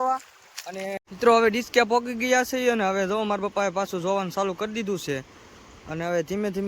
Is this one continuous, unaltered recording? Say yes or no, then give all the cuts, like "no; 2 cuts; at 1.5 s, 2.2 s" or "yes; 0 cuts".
no; 1 cut; at 1.0 s